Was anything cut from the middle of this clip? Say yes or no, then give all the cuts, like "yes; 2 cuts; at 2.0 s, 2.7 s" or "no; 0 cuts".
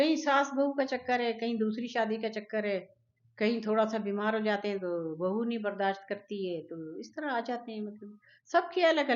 no; 0 cuts